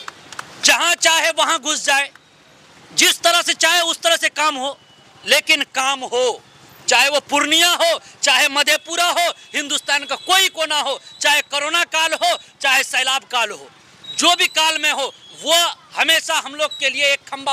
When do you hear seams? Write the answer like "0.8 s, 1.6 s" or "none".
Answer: none